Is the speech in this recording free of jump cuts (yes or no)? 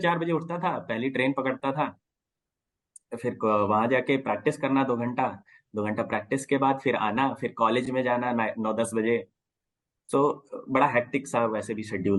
yes